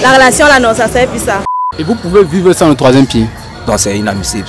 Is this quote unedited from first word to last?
no; 1 cut; at 1.7 s

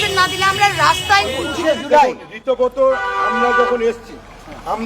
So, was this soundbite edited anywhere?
yes; 1 cut; at 1.5 s

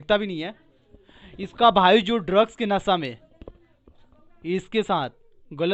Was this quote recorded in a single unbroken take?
yes; 0 cuts

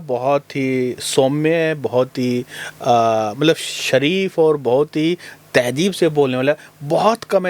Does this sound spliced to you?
no; 0 cuts

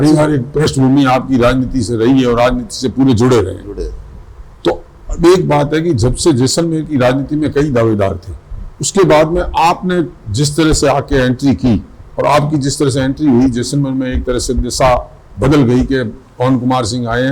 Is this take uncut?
yes; 0 cuts

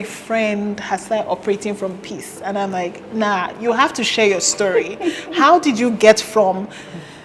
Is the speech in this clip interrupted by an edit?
no; 0 cuts

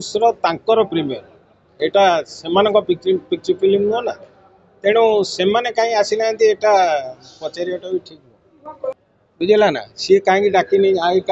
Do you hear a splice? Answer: yes; 1 cut; at 9.0 s

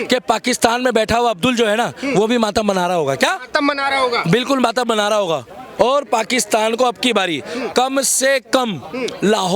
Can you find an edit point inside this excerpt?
yes; 1 cut; at 5.6 s

